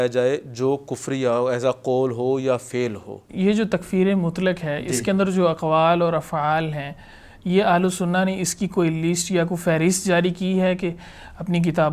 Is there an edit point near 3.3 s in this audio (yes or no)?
yes